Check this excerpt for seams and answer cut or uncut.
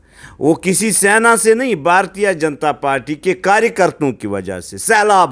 uncut